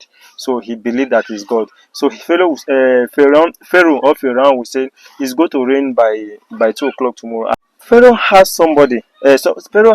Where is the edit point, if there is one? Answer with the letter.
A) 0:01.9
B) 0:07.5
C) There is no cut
B